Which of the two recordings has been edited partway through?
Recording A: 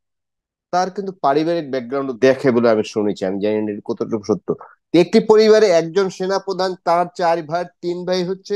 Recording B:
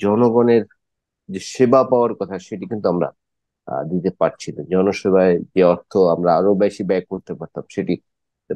A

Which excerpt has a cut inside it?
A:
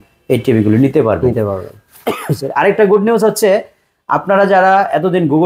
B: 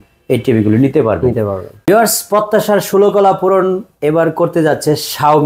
B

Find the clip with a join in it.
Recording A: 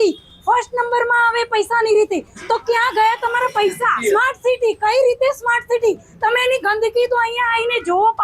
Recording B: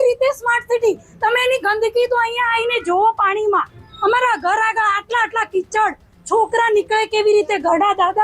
A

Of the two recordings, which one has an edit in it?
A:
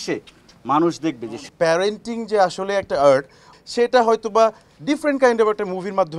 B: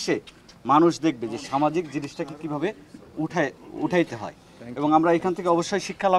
A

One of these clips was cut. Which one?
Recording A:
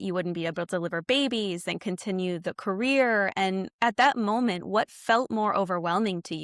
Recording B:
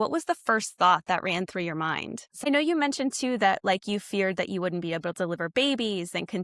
B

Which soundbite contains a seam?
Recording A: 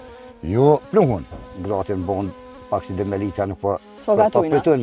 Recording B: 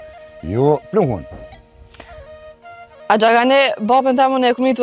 A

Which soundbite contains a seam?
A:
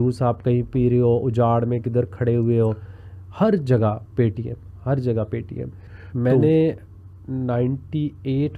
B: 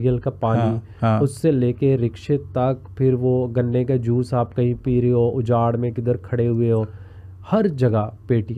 A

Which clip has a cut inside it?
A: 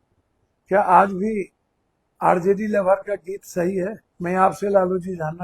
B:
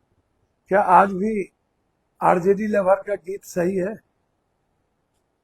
A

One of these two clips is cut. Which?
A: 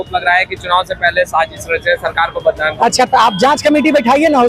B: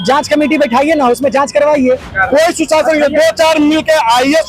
B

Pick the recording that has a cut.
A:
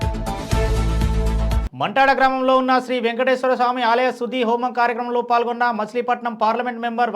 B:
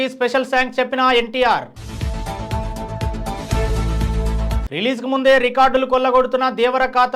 A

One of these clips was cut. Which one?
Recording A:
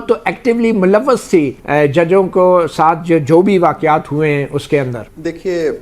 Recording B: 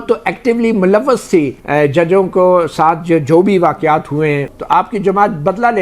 B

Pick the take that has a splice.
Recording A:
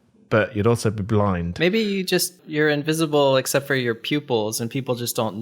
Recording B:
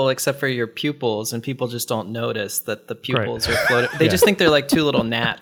A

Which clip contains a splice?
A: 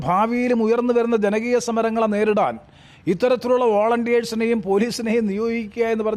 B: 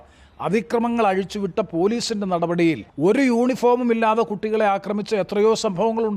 B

